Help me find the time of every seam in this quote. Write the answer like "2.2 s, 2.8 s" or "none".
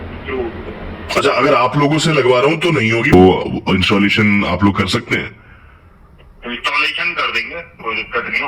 2.7 s